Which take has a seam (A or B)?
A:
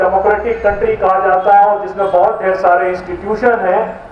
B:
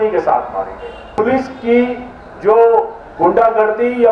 B